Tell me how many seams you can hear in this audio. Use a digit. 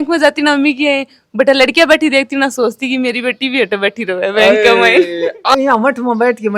1